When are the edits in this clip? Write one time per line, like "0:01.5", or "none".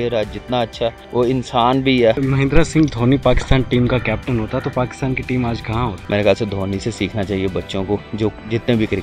0:01.0
0:02.2
0:06.0